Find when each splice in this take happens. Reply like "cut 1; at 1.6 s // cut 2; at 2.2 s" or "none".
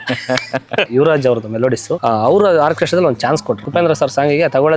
cut 1; at 0.9 s // cut 2; at 1.9 s // cut 3; at 3.6 s